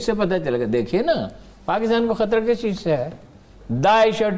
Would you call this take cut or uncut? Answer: uncut